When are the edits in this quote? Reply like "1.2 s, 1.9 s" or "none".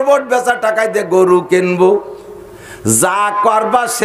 none